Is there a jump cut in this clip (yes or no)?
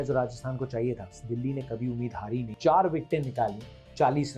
yes